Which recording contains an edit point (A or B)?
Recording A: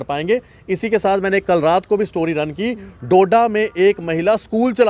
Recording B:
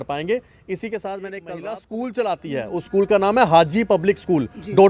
B